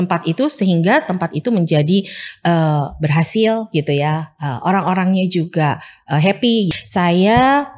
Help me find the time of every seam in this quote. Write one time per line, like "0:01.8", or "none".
0:06.7